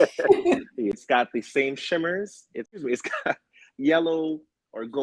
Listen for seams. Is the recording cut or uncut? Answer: cut